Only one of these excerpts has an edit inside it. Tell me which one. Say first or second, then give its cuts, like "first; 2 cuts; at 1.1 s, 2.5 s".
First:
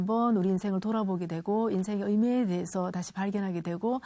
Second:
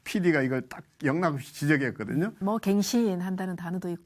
second; 1 cut; at 2.4 s